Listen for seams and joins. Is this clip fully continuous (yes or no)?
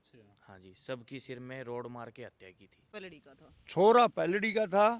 no